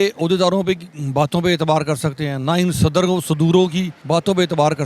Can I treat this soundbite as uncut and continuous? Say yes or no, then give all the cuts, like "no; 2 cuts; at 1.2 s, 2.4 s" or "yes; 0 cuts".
no; 1 cut; at 3.9 s